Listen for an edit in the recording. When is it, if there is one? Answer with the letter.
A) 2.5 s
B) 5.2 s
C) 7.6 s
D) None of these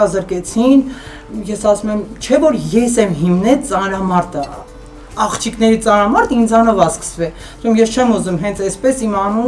D